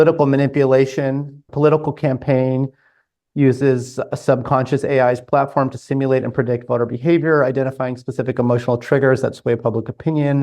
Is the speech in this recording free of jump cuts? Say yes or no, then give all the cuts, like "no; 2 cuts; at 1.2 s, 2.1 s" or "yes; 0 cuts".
no; 1 cut; at 1.4 s